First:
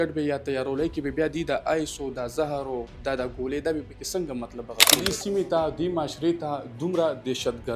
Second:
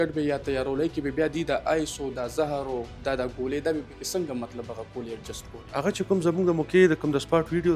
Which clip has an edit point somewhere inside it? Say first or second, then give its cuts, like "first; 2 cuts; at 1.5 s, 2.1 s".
first; 1 cut; at 4.8 s